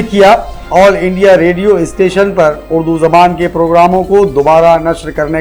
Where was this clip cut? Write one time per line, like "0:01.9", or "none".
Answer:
none